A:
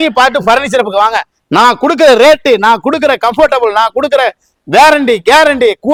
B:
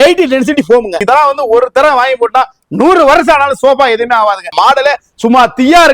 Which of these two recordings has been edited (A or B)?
B